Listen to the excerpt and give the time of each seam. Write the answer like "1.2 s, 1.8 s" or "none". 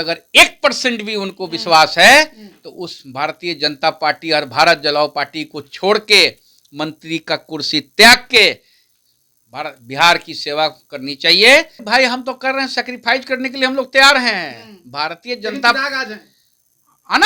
11.8 s